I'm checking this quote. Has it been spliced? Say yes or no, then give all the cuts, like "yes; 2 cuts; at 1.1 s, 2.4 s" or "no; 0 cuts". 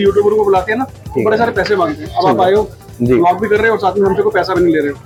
no; 0 cuts